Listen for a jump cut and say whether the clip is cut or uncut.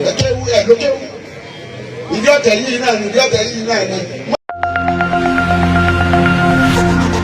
cut